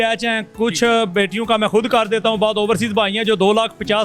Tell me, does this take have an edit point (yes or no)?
no